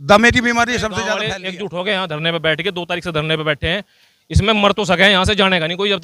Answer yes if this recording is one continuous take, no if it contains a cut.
no